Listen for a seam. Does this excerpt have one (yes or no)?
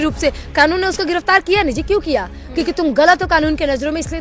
no